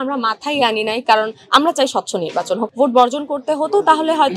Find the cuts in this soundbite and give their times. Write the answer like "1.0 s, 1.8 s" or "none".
2.7 s